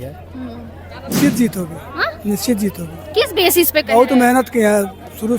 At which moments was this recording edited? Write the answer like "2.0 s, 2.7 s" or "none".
1.1 s